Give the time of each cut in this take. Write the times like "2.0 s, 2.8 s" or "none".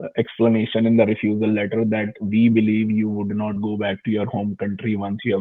none

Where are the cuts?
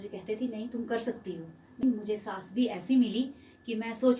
1.8 s

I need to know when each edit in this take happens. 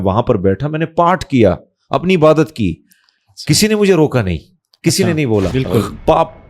5.5 s

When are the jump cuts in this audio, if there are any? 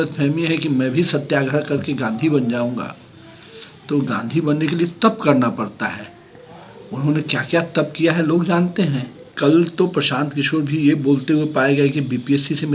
9.2 s

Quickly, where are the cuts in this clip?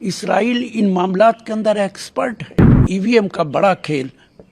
2.8 s

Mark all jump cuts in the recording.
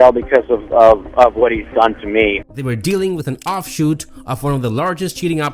2.4 s

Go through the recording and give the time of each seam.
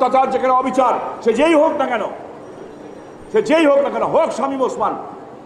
none

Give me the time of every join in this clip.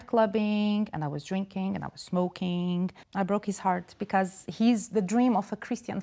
3.1 s

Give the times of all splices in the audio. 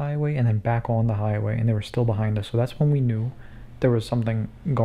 none

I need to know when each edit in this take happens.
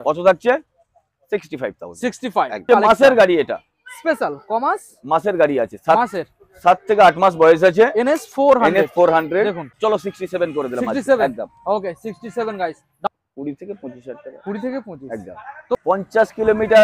2.6 s, 9.7 s, 13.1 s, 15.8 s

